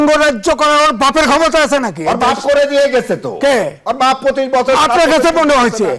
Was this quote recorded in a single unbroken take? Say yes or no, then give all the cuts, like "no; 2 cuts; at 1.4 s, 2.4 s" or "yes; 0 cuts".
yes; 0 cuts